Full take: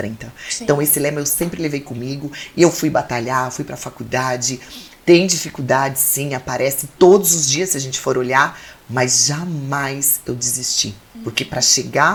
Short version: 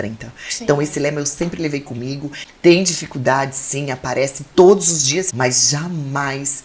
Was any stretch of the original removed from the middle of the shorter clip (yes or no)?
yes